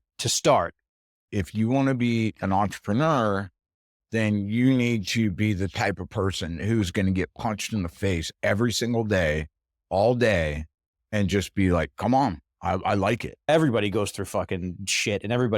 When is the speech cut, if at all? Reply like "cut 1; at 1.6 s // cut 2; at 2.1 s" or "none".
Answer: cut 1; at 1.2 s // cut 2; at 13.5 s